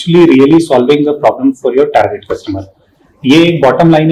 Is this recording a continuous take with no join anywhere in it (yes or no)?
yes